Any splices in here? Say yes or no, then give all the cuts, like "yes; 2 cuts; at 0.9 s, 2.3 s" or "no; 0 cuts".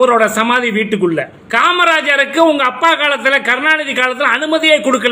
yes; 1 cut; at 1.4 s